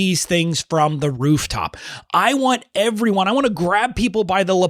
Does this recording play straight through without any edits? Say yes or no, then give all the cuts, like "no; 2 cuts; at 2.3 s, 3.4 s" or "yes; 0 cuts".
yes; 0 cuts